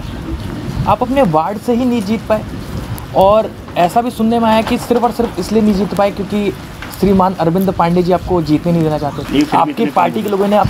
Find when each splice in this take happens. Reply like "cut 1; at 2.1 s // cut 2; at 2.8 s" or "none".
cut 1; at 9.2 s